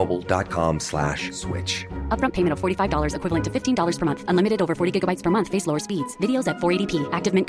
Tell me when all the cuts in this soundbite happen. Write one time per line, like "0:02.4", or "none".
none

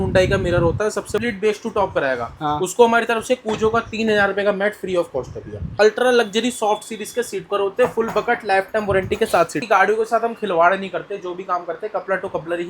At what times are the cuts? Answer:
0:01.2
0:05.7
0:09.6

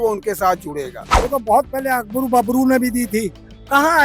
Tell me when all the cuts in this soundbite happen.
0:01.1

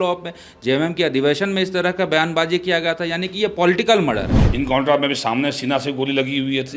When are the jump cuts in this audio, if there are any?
0:04.4

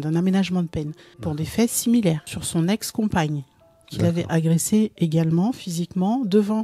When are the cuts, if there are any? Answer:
0:01.3
0:02.3

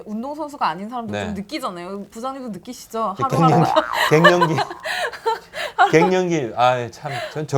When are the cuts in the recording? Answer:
none

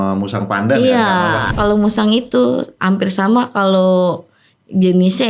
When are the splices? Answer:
0:01.5

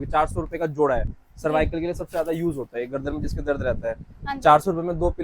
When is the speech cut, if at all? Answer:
none

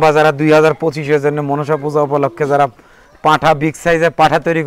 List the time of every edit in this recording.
none

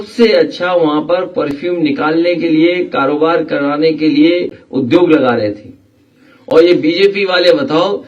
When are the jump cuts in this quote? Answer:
none

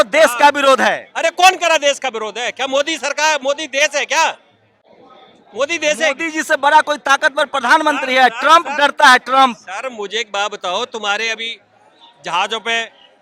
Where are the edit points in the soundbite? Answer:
none

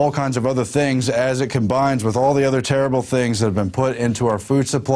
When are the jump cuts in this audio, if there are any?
0:02.8

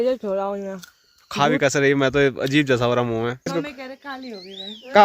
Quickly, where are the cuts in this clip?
0:03.5

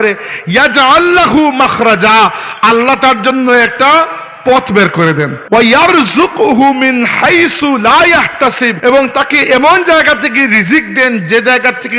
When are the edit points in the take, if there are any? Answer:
0:05.4
0:08.7

